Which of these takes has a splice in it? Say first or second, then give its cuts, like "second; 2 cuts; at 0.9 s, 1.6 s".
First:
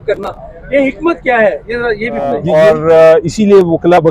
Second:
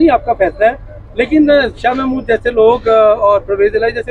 first; 1 cut; at 2.4 s